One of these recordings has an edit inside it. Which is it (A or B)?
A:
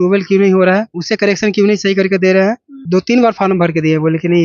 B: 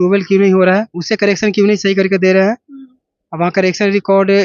A